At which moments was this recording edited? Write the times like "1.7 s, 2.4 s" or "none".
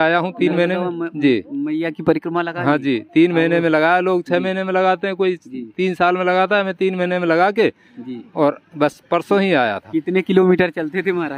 none